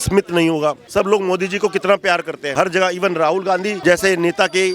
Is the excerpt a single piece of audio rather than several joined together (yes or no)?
no